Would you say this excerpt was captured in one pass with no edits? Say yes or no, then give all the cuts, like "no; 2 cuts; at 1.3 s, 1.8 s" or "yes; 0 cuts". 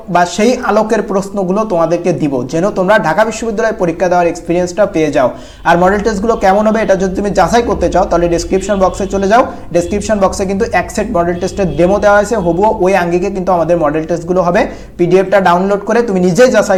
yes; 0 cuts